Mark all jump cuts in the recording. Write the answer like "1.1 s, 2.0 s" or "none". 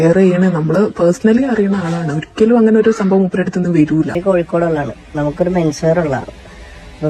4.2 s